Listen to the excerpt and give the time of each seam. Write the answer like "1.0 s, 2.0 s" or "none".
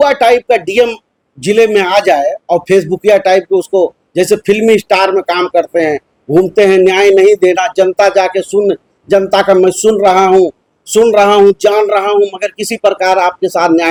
none